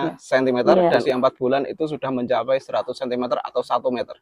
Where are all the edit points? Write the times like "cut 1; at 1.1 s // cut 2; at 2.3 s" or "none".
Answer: cut 1; at 1.0 s